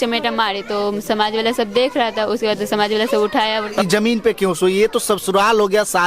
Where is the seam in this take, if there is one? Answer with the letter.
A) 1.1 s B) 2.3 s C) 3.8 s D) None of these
C